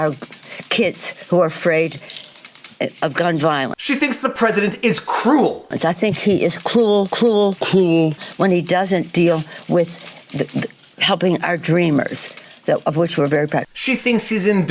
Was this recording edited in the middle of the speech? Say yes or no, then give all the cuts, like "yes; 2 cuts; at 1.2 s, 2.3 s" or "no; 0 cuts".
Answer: no; 0 cuts